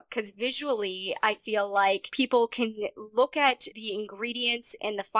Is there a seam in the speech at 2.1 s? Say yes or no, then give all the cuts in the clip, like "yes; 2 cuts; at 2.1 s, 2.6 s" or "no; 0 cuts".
yes; 2 cuts; at 2.1 s, 3.7 s